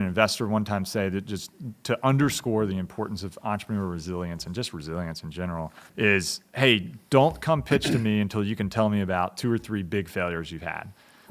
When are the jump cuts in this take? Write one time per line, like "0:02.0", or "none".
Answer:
0:05.9

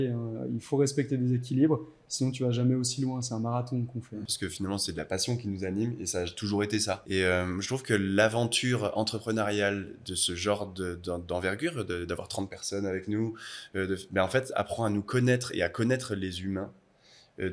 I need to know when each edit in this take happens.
0:04.3
0:07.0

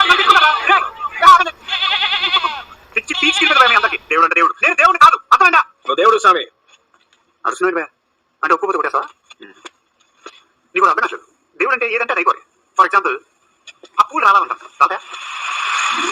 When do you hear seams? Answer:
none

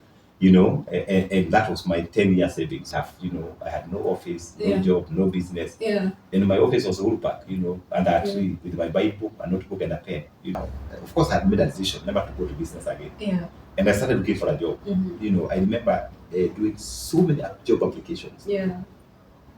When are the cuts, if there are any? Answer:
0:02.9
0:10.5

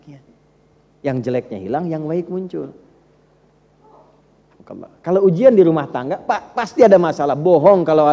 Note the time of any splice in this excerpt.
none

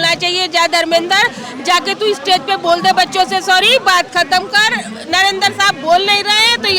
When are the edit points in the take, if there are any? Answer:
none

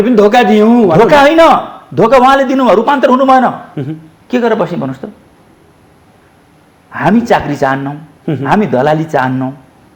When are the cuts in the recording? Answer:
none

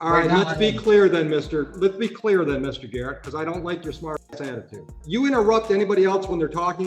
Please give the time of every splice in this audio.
0:04.9

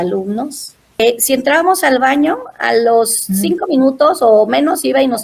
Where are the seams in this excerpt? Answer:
0:01.0

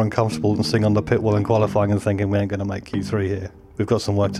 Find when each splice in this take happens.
0:03.5

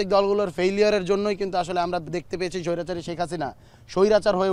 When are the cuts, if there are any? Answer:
none

